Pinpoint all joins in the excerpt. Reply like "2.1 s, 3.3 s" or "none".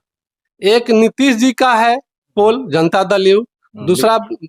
none